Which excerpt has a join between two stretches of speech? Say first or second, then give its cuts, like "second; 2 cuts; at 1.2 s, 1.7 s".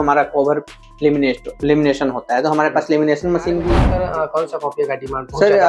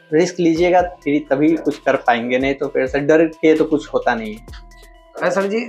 first; 1 cut; at 3.9 s